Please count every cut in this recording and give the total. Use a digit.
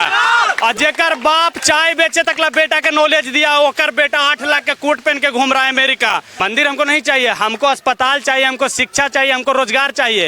1